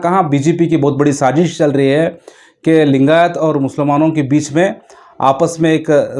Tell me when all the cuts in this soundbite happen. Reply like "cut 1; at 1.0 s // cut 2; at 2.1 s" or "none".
none